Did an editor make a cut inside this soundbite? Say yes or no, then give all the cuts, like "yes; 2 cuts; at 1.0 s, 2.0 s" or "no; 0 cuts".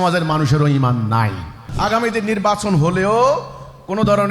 yes; 1 cut; at 1.6 s